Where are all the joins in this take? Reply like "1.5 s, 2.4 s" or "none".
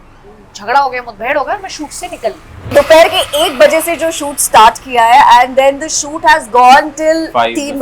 2.7 s